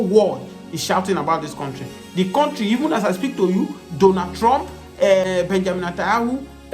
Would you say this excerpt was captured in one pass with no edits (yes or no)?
no